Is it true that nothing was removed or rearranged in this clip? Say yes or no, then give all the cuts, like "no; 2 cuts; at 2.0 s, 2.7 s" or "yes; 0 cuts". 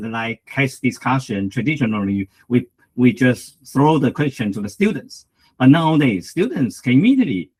yes; 0 cuts